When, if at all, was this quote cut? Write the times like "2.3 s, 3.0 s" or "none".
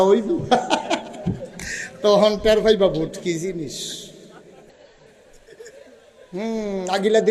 4.7 s